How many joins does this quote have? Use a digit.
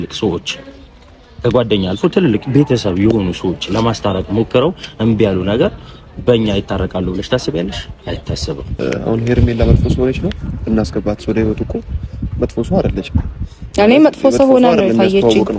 1